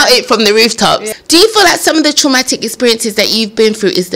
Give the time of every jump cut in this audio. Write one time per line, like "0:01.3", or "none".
0:01.1